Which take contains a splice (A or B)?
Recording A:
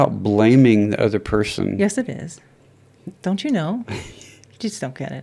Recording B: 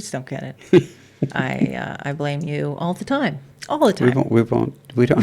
B